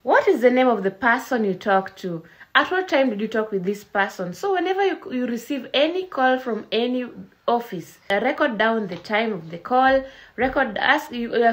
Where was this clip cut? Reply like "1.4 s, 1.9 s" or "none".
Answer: 8.1 s